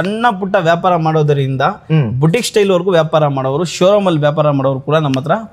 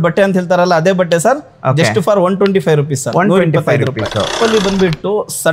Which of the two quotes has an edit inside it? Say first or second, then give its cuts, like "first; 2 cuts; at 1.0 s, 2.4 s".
second; 1 cut; at 4.4 s